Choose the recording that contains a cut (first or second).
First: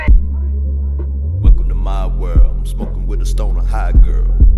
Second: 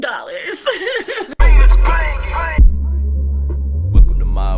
second